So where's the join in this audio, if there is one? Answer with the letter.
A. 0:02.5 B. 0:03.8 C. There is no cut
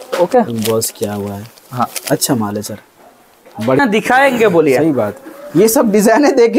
B